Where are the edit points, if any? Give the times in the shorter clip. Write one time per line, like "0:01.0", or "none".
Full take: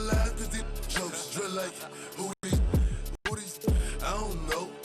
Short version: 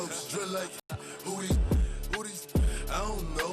0:02.0